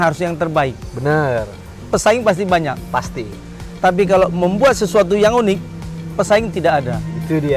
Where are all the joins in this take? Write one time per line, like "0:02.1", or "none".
none